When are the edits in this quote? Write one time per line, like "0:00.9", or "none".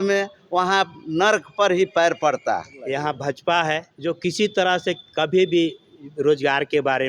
0:02.8
0:03.9